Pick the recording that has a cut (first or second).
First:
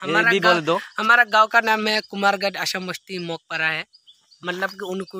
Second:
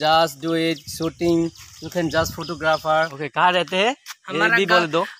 second